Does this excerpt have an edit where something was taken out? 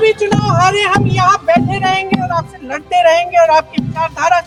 no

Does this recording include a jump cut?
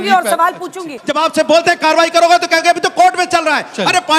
yes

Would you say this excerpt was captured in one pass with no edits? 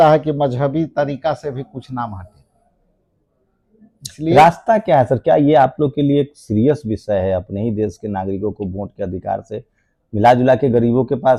yes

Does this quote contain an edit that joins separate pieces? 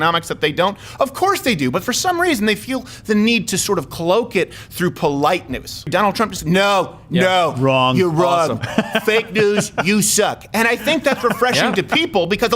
yes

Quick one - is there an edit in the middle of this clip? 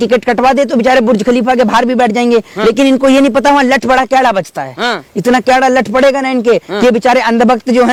no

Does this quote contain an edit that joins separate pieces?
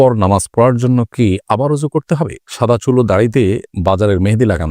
yes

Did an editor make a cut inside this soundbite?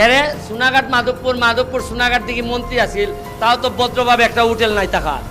no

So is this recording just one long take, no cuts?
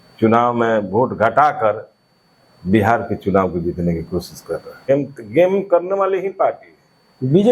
no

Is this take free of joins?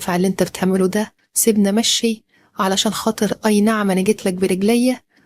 no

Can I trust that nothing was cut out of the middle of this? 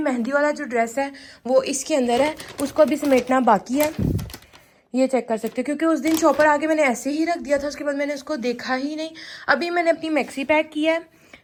yes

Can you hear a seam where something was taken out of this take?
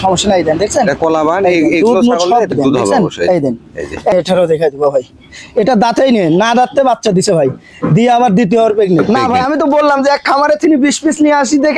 yes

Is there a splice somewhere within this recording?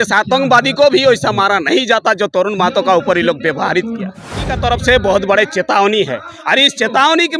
yes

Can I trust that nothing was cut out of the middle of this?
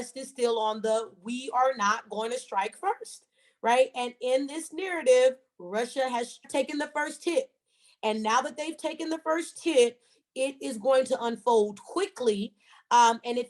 no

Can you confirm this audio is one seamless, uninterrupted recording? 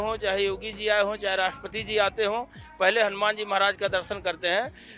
yes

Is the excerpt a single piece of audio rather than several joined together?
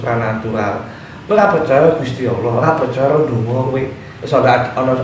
yes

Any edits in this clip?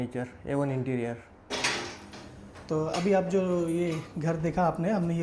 no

